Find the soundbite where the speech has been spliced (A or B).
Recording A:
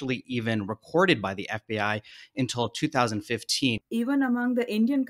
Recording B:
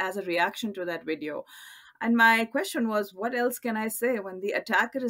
A